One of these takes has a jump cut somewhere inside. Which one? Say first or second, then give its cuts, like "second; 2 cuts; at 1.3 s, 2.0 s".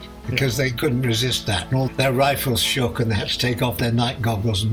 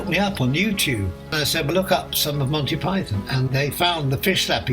second; 1 cut; at 1.3 s